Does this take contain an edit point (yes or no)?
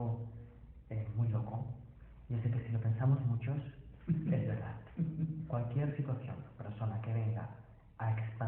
yes